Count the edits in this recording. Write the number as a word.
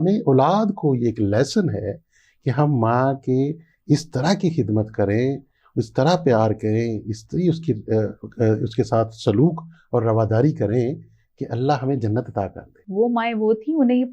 one